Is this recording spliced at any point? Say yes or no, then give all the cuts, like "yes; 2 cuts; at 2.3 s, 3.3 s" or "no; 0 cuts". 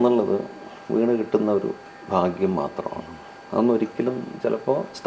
no; 0 cuts